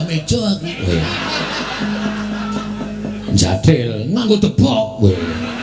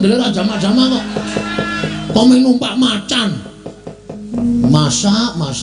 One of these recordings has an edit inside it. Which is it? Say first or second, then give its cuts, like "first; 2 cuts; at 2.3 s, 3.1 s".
second; 1 cut; at 4.3 s